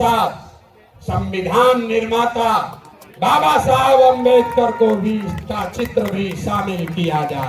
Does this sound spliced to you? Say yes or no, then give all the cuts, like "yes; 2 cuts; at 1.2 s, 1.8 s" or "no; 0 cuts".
no; 0 cuts